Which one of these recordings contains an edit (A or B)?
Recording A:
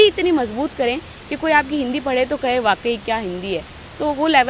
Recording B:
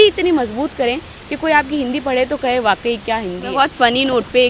B